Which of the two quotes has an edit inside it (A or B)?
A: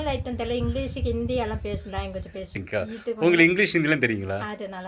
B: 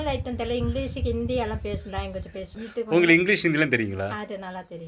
B